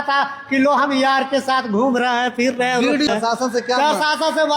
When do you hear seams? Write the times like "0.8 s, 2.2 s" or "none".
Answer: 3.1 s